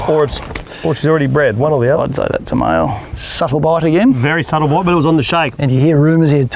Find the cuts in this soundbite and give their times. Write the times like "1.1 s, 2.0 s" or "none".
3.1 s, 5.5 s

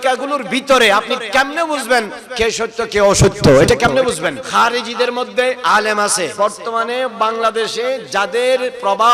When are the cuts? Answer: 4.4 s, 6.3 s

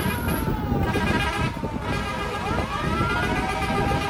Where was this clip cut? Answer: none

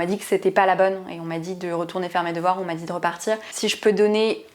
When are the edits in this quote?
3.5 s

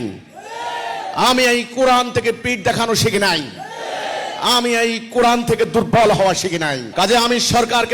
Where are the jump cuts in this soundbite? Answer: 6.9 s

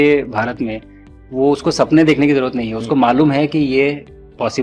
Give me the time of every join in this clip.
none

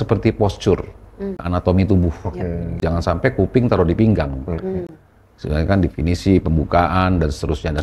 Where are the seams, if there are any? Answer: 1.4 s, 2.8 s

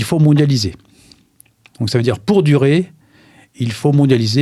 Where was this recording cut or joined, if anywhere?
none

